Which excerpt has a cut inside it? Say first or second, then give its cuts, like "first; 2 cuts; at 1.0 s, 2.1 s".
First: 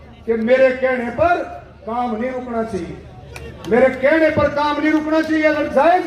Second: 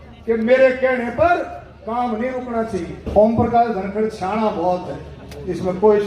second; 1 cut; at 3.1 s